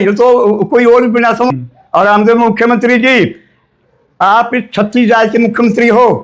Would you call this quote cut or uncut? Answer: cut